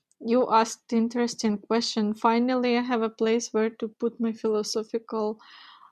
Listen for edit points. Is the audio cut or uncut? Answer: uncut